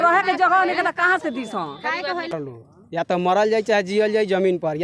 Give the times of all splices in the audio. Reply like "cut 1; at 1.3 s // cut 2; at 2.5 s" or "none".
cut 1; at 2.3 s